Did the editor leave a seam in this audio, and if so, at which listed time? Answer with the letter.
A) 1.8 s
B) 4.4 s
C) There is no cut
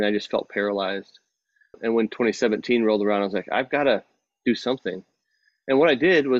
A